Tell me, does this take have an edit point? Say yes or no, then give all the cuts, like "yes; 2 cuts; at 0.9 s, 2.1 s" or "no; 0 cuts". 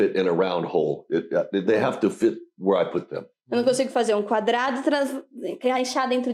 no; 0 cuts